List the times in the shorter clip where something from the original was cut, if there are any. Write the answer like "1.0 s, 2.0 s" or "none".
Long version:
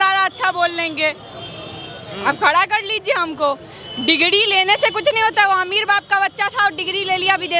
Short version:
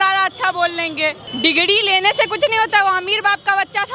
1.2 s